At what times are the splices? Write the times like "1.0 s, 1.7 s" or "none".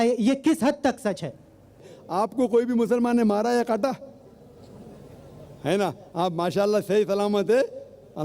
1.9 s

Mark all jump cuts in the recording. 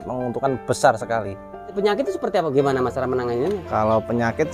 1.8 s

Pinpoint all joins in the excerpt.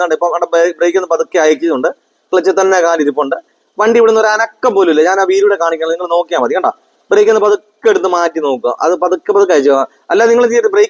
none

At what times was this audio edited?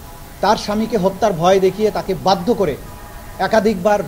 none

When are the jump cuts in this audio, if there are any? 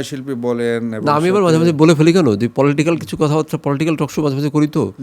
none

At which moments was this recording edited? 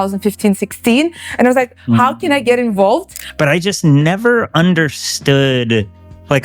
3.2 s

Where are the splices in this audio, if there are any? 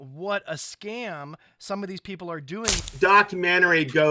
2.9 s

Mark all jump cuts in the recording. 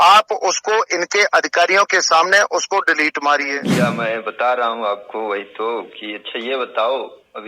3.6 s

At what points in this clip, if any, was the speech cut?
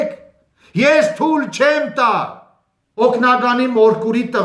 2.9 s

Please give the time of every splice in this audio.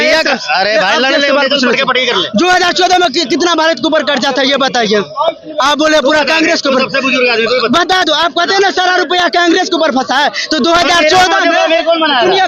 none

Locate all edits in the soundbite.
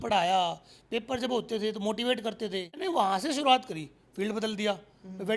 2.8 s

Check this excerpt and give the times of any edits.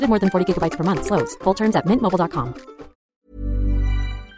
3.1 s

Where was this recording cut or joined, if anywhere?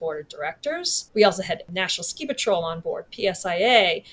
1.0 s, 1.7 s

